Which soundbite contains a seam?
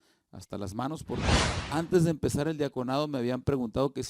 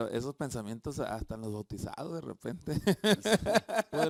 first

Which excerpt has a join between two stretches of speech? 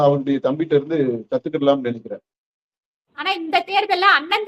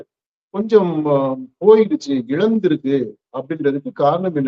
first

